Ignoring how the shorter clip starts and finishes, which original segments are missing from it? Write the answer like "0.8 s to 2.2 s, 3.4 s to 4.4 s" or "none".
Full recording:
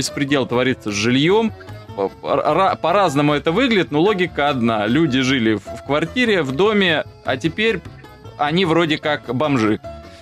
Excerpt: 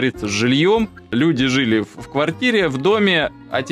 1.7 s to 4.8 s